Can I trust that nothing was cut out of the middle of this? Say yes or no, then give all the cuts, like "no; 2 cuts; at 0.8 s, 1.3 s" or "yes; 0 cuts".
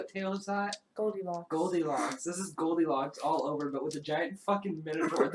yes; 0 cuts